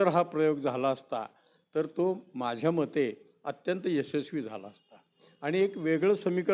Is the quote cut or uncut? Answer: uncut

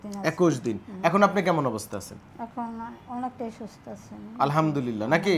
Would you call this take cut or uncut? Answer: uncut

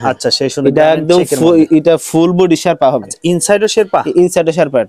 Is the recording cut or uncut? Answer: uncut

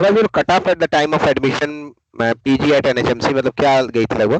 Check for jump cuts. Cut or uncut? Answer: uncut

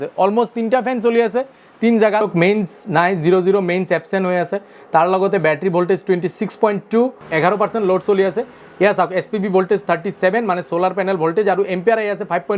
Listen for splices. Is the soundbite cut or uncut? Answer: cut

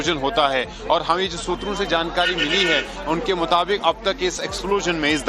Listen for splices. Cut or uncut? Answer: cut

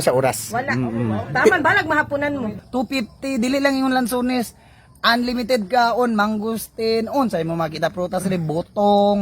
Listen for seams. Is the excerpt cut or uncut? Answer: cut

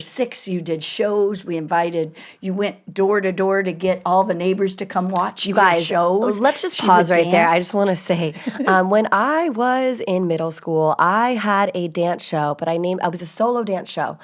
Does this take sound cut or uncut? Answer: uncut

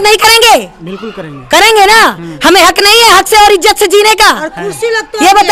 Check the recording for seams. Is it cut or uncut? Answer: uncut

